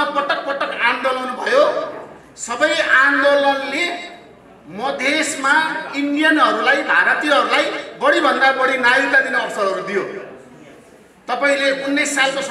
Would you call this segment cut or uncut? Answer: uncut